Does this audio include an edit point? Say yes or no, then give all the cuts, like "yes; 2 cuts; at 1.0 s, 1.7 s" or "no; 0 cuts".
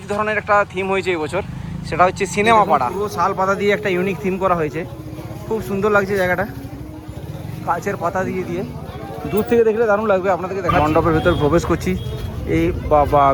yes; 2 cuts; at 2.9 s, 10.8 s